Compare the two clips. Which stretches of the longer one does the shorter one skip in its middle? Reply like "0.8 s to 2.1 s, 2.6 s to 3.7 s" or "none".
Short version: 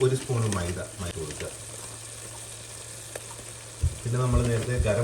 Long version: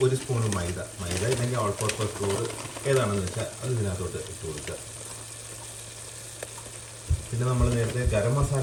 1.0 s to 4.3 s